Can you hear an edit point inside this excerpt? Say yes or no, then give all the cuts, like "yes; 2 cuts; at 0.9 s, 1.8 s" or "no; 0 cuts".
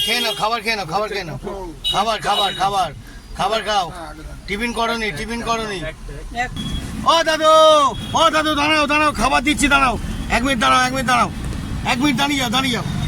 yes; 1 cut; at 6.6 s